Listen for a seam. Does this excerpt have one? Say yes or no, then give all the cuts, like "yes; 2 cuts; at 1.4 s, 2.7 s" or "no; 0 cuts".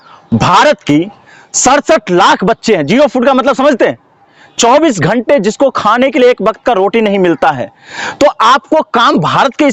no; 0 cuts